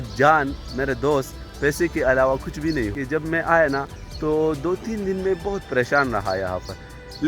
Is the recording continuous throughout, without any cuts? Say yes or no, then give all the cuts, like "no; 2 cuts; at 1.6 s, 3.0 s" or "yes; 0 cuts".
no; 1 cut; at 3.0 s